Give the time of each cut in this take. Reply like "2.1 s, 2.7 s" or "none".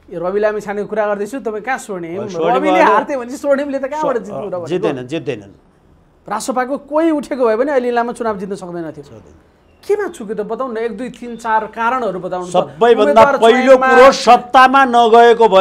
none

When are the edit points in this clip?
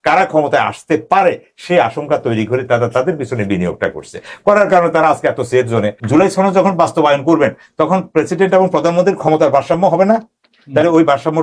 6.0 s

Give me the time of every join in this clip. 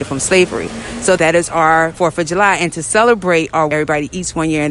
1.2 s, 1.9 s, 3.7 s

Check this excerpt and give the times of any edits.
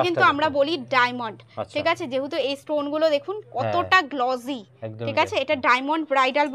none

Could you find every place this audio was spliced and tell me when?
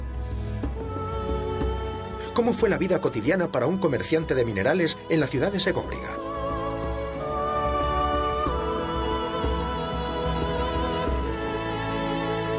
none

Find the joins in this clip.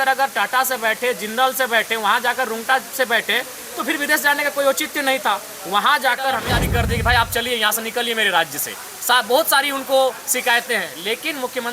6.5 s

